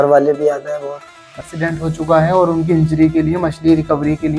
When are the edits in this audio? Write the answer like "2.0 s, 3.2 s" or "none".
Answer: 1.5 s